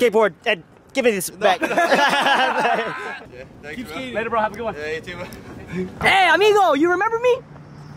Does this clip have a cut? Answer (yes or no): no